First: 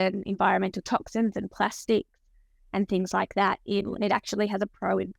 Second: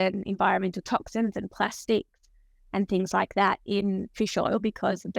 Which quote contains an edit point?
first; 1 cut; at 3.9 s

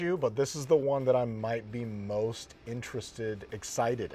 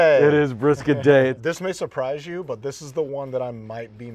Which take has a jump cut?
second; 1 cut; at 1.4 s

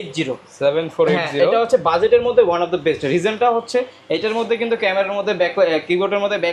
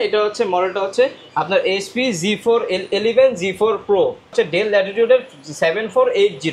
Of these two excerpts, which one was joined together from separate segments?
second; 1 cut; at 4.3 s

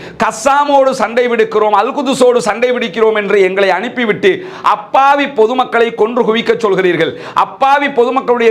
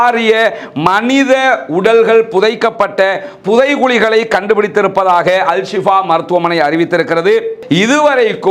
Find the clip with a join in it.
second; 1 cut; at 7.6 s

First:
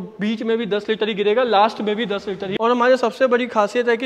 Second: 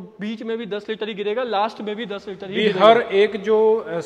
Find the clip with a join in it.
first; 1 cut; at 2.6 s

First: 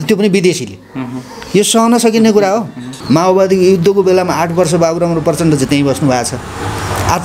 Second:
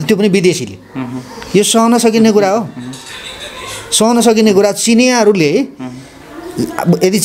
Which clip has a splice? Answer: first; 1 cut; at 2.9 s

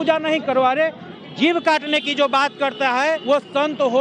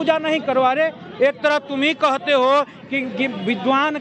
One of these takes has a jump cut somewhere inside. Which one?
first; 2 cuts; at 1.1 s, 3.2 s

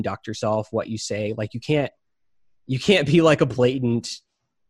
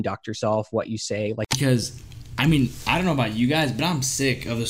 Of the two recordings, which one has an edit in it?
second; 1 cut; at 1.6 s

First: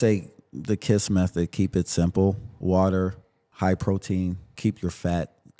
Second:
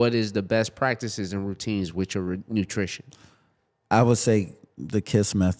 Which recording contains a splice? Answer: first; 3 cuts; at 2.5 s, 3.4 s, 4.5 s

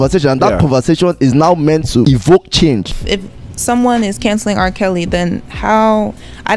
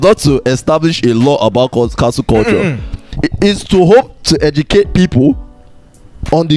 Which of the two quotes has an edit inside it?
first; 2 cuts; at 2.0 s, 3.0 s

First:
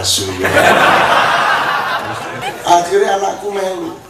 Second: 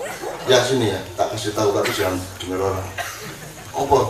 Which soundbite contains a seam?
first; 1 cut; at 2.4 s

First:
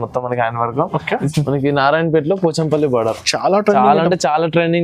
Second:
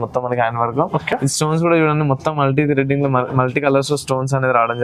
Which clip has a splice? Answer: first; 1 cut; at 1.2 s

